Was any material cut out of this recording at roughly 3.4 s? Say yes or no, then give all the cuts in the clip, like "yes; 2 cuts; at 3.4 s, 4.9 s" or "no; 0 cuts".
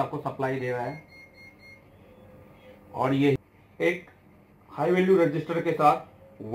yes; 1 cut; at 3.4 s